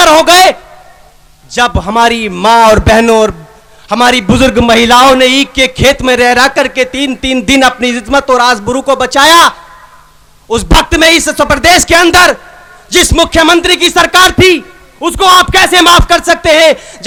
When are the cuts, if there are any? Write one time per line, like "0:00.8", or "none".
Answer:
none